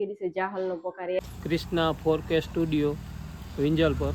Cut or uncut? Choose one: cut